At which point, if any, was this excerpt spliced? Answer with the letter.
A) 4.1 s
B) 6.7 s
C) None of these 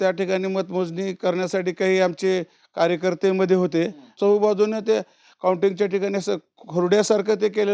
A